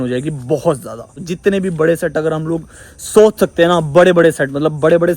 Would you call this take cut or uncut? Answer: cut